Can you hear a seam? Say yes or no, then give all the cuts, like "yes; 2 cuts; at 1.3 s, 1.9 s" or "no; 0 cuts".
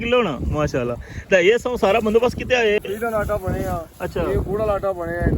yes; 1 cut; at 2.8 s